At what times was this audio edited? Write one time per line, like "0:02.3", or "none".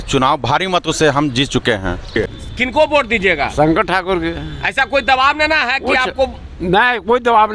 0:02.5